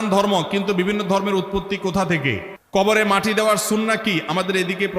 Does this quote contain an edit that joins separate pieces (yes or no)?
yes